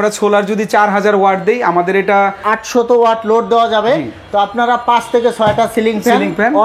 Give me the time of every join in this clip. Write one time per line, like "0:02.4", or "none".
0:02.4